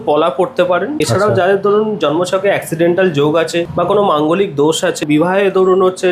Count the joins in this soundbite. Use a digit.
3